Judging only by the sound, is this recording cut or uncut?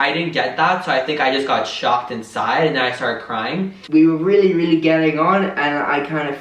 cut